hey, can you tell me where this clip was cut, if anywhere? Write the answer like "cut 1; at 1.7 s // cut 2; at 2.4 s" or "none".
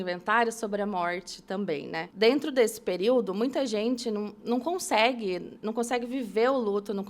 cut 1; at 2.0 s